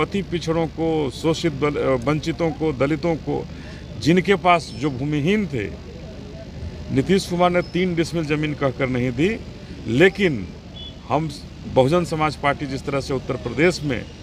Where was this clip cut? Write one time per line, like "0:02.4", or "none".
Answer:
none